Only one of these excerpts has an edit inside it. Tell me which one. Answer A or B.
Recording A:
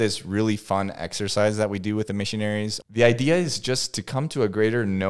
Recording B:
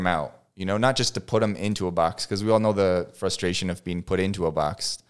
A